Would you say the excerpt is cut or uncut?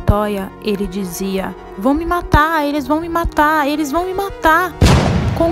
uncut